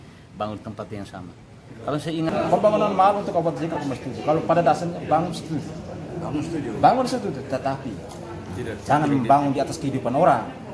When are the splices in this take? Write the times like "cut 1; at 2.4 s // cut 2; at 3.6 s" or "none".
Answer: cut 1; at 2.3 s